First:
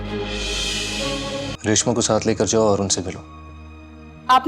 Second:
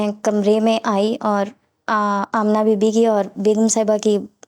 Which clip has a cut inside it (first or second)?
first